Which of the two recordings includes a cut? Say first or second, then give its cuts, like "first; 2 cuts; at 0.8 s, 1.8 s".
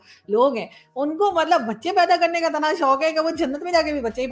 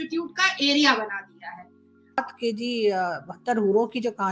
second; 1 cut; at 2.2 s